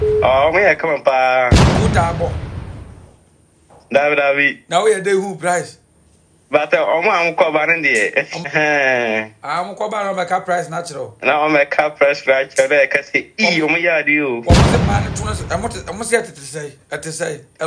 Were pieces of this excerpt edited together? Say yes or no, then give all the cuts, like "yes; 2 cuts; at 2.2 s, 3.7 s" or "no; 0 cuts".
yes; 1 cut; at 8.5 s